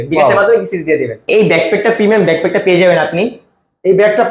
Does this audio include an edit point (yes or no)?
yes